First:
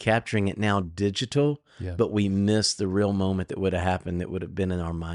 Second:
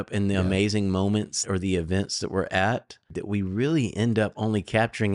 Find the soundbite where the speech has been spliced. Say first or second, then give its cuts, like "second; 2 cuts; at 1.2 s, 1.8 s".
second; 2 cuts; at 1.4 s, 3.2 s